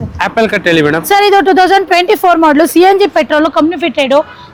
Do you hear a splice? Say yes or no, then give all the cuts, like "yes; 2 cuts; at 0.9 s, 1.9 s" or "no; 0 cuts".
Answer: no; 0 cuts